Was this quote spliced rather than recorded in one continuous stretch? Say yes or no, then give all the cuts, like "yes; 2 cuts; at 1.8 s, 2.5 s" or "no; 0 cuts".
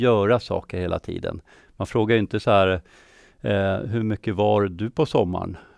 no; 0 cuts